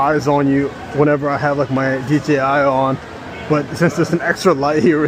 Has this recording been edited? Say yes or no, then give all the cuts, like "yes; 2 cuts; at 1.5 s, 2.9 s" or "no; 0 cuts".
no; 0 cuts